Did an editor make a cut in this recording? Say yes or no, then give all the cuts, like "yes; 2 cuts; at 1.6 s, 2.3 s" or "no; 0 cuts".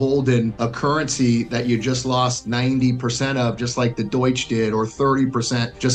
no; 0 cuts